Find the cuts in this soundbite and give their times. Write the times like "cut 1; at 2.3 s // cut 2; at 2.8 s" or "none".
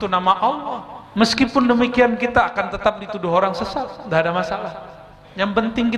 cut 1; at 0.9 s